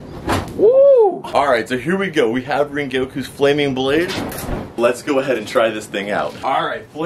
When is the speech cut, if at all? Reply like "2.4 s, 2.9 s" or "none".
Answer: 1.3 s